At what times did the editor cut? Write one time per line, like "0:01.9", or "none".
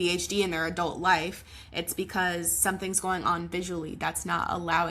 none